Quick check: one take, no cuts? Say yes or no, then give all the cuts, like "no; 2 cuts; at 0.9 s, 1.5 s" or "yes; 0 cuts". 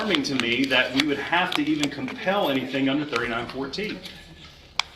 yes; 0 cuts